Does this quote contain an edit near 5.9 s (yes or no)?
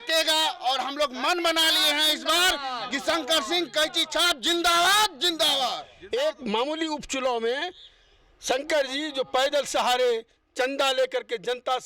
yes